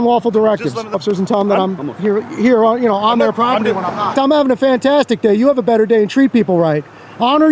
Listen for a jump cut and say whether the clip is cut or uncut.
cut